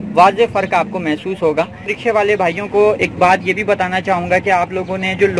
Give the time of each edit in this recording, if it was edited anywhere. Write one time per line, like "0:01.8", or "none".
0:01.9